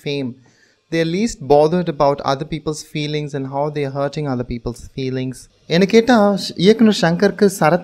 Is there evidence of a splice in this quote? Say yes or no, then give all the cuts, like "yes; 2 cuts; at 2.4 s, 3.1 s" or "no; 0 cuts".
yes; 1 cut; at 5.5 s